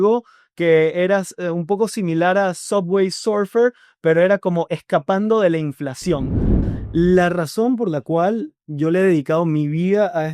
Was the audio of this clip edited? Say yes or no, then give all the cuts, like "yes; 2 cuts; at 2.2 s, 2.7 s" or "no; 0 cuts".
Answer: yes; 1 cut; at 6.6 s